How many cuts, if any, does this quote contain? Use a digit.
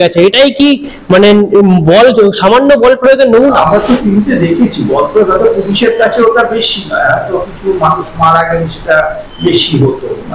1